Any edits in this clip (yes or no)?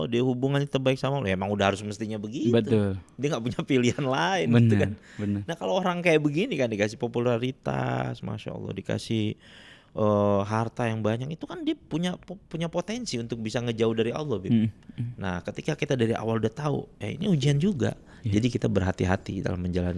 no